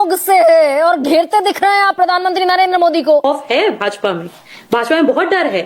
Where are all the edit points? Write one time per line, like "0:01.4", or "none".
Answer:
0:03.2